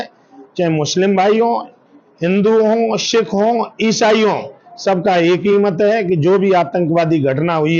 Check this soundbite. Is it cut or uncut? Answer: uncut